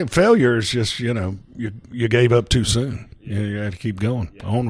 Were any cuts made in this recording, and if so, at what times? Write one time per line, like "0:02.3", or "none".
0:01.4